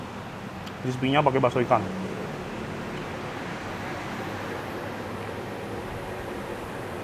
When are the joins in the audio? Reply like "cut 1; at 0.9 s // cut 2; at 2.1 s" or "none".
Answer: none

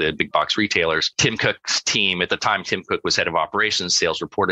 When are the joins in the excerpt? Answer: cut 1; at 1.1 s

